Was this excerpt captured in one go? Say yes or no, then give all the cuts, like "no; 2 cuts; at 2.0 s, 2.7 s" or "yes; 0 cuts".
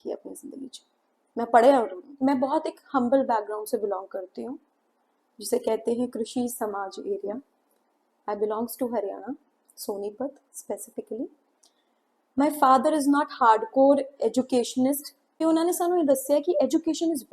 no; 1 cut; at 2.1 s